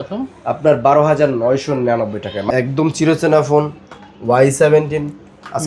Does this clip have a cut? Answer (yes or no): yes